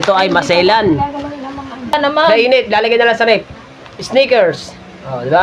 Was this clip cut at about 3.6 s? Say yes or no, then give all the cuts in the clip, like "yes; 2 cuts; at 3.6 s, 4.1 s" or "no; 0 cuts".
no; 1 cut; at 1.9 s